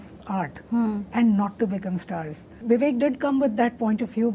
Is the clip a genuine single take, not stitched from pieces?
no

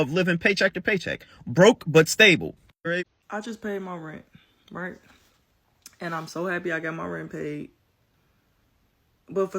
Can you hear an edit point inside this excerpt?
yes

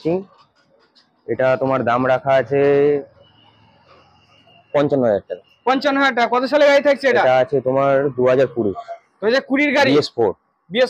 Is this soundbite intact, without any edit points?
yes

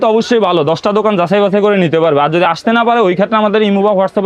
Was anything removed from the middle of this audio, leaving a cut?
no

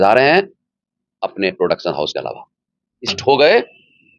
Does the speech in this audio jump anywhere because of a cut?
yes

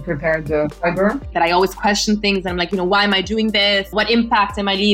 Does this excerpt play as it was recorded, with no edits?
no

